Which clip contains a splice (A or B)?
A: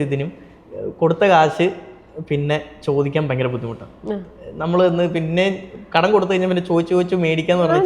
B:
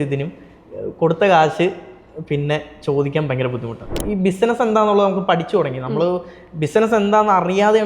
B